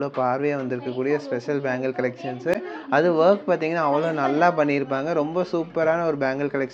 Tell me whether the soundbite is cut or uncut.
uncut